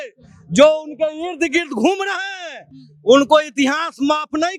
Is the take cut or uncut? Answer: uncut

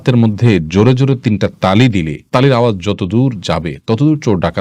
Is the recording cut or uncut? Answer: uncut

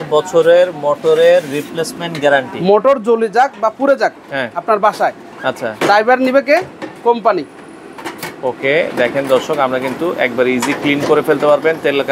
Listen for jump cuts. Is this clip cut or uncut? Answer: uncut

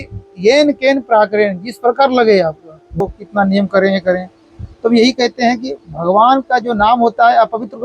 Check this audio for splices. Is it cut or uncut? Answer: cut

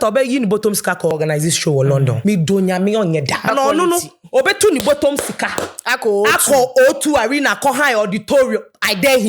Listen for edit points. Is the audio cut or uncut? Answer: cut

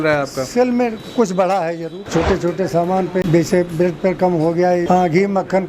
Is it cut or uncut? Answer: cut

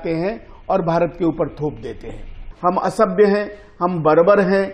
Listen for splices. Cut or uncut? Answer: cut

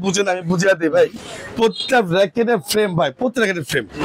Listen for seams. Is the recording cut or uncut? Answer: uncut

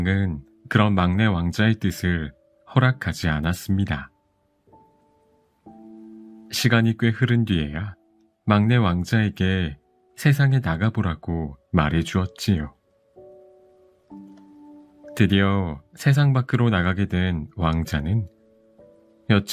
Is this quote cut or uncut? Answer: uncut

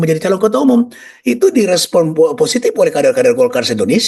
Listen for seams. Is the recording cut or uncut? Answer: uncut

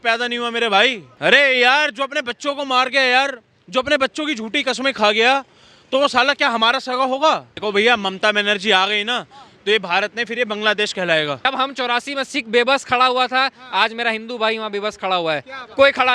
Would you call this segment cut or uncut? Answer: cut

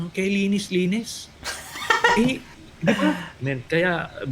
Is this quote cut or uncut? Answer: cut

